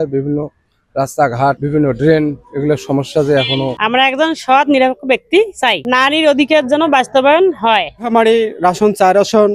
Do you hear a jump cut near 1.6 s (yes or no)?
yes